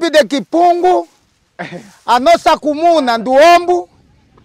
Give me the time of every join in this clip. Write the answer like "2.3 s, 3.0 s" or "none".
none